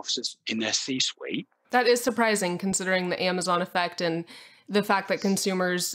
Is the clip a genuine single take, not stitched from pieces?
no; 1 cut; at 1.6 s

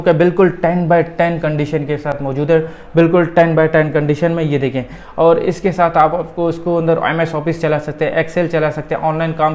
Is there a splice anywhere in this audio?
no; 0 cuts

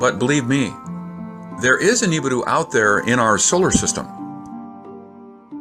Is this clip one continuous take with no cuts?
yes; 0 cuts

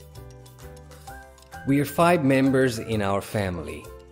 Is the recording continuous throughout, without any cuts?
no; 1 cut; at 1.6 s

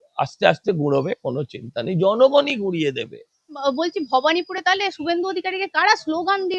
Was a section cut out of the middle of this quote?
yes; 1 cut; at 3.5 s

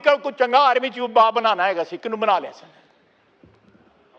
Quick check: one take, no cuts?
yes; 0 cuts

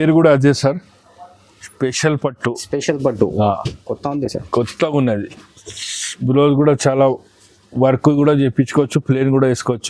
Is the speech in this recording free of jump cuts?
yes; 0 cuts

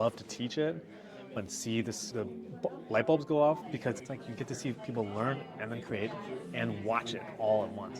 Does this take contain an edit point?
yes; 1 cut; at 3.7 s

